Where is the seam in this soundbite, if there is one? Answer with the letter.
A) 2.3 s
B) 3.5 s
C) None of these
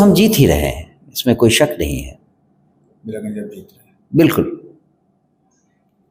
C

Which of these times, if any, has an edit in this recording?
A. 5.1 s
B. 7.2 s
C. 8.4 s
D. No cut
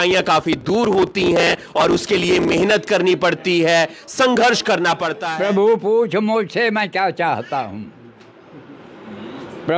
A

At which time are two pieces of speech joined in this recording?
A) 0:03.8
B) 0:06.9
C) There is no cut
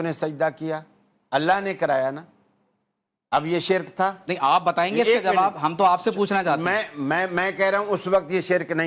C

